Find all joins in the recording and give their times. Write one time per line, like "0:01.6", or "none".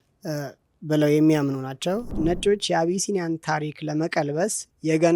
0:02.1